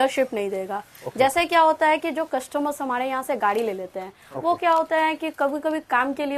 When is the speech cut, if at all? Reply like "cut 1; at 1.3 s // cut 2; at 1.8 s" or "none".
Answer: none